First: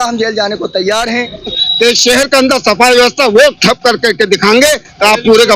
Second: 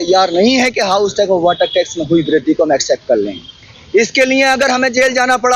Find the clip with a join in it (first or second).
first